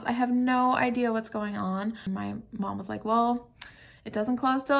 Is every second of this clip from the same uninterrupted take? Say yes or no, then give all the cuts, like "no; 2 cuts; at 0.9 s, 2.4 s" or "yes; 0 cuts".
no; 1 cut; at 2.0 s